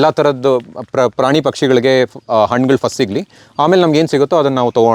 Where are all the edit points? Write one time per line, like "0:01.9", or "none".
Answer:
none